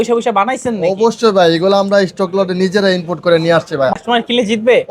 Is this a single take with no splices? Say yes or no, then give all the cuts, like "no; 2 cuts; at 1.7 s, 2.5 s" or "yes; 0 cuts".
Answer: no; 1 cut; at 3.9 s